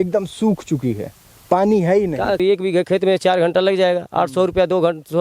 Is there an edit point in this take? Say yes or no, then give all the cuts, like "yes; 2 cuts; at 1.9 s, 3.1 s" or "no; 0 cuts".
yes; 1 cut; at 2.4 s